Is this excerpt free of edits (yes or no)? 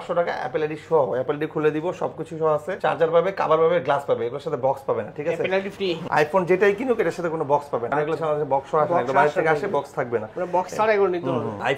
yes